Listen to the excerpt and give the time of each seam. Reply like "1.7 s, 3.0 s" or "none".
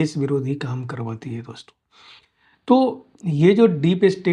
none